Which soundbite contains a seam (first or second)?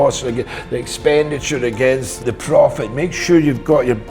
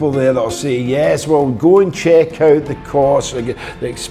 first